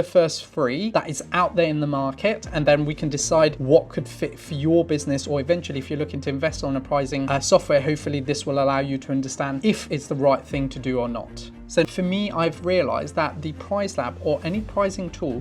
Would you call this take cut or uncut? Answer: cut